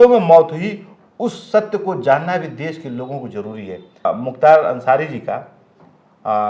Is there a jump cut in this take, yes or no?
yes